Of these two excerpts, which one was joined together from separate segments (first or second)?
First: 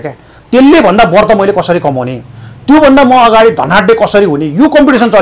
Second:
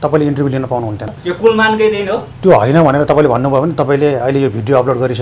second